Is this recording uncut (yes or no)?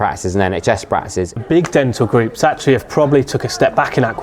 no